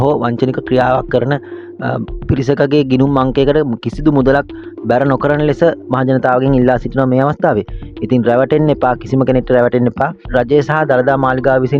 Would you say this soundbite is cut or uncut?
uncut